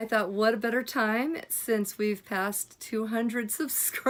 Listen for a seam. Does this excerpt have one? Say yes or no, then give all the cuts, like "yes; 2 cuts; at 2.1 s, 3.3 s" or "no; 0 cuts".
no; 0 cuts